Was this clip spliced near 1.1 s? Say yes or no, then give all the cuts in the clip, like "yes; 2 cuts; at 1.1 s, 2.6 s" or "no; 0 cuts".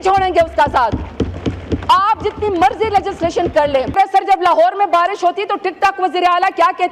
no; 1 cut; at 4.0 s